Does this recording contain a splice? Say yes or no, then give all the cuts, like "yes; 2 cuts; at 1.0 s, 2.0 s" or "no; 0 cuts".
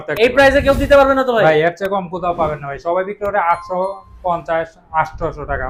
no; 0 cuts